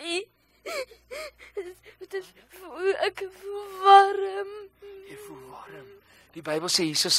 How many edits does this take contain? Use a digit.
0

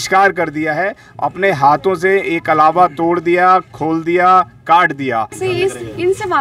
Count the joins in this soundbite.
1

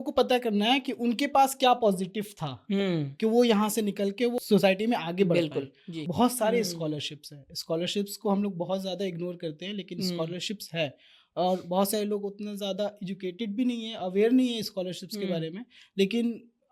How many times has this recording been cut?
2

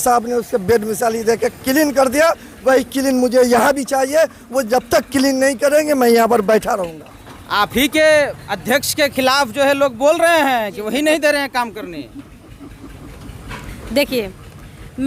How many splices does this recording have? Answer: 0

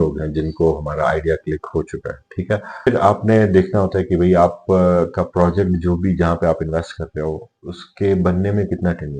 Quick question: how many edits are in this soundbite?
1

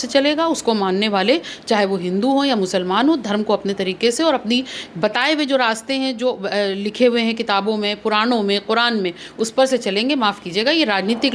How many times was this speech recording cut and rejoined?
0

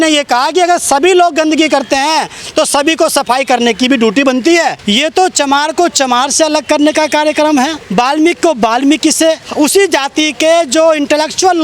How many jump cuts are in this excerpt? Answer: 3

